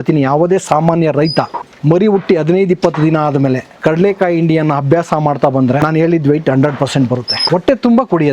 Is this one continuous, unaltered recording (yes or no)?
no